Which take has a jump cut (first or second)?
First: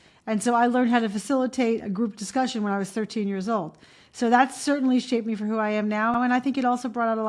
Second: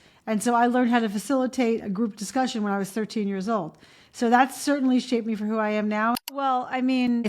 second